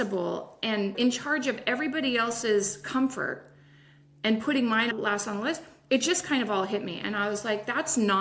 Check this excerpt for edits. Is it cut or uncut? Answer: cut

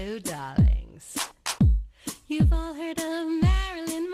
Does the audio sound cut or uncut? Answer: cut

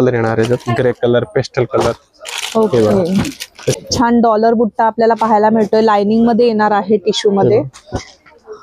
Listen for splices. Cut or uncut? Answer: cut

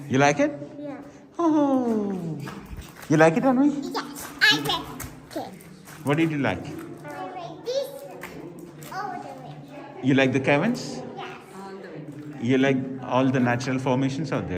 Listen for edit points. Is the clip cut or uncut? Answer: cut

